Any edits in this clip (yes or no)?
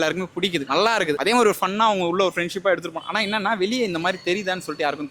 yes